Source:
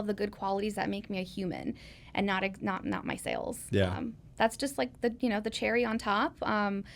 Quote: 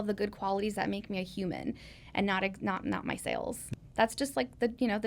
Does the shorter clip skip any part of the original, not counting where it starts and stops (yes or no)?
yes